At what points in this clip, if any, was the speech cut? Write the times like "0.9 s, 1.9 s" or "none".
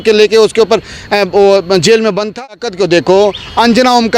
2.4 s